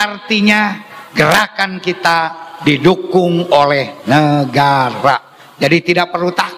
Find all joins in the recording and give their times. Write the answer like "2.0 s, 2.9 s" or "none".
none

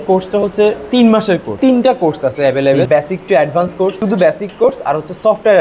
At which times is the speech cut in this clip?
1.5 s, 2.9 s, 4.0 s

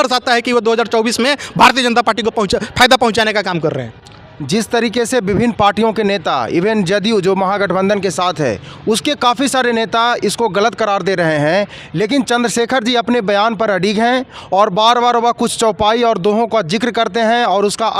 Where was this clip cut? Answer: none

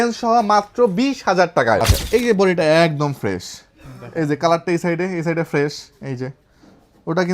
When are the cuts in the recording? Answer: 1.9 s

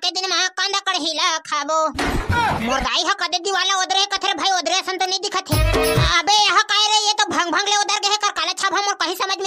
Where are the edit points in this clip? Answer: 6.1 s

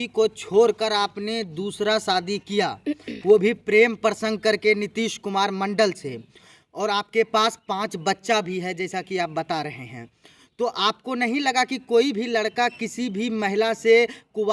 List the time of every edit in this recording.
none

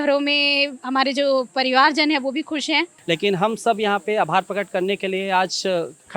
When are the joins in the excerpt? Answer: 2.9 s

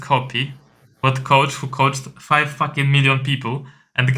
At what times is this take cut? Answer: none

